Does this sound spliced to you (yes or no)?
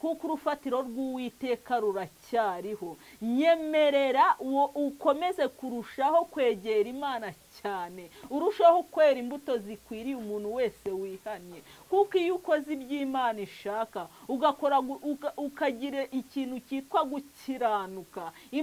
no